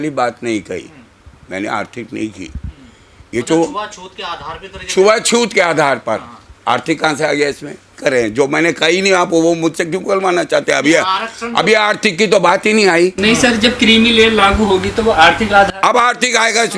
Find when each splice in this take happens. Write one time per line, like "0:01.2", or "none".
none